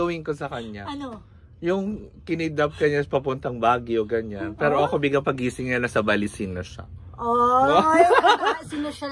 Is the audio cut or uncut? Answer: uncut